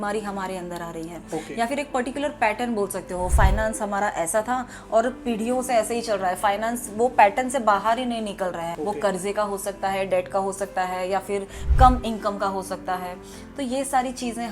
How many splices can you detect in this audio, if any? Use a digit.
1